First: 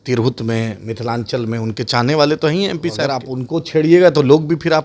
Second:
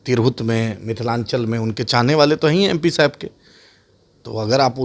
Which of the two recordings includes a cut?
first; 1 cut; at 3.2 s

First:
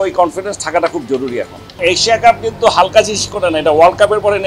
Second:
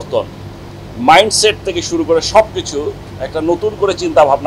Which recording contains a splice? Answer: first; 1 cut; at 1.6 s

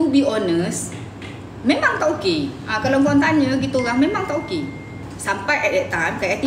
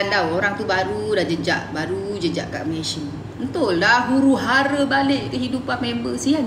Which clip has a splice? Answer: first; 1 cut; at 5.1 s

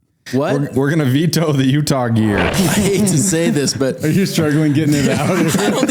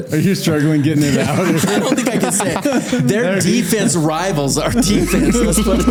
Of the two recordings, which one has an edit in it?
first; 1 cut; at 2.5 s

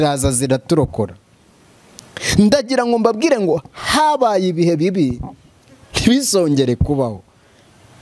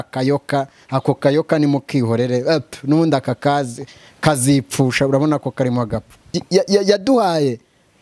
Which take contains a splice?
second; 1 cut; at 6.4 s

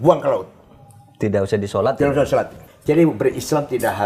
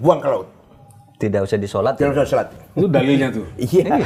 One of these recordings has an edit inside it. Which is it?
first; 1 cut; at 2.6 s

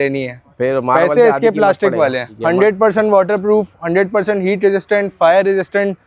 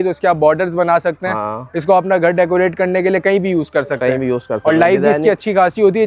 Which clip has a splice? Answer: first; 1 cut; at 2.3 s

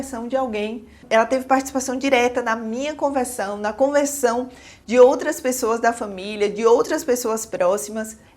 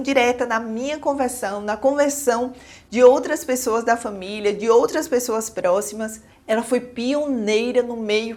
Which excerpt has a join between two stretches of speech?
first; 1 cut; at 1.0 s

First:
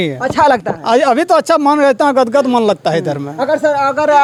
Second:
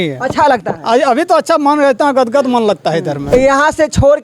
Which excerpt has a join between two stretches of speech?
second; 1 cut; at 3.2 s

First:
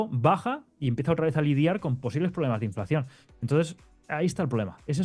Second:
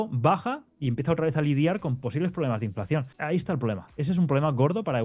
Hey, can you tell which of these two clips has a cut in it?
second; 1 cut; at 3.1 s

